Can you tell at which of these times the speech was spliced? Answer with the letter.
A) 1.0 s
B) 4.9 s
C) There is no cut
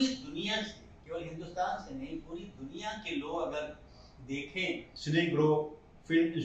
B